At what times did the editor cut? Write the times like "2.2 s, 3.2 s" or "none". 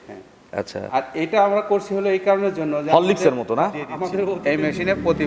4.4 s